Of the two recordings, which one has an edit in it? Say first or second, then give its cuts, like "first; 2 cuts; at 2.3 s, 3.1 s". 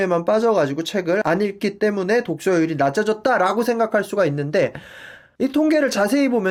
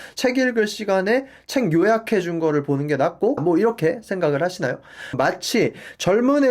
second; 2 cuts; at 3.4 s, 5.1 s